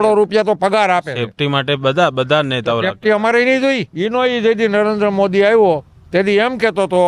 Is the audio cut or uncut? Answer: cut